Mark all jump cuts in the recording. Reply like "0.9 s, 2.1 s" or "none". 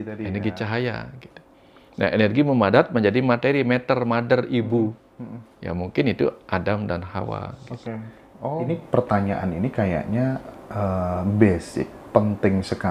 8.7 s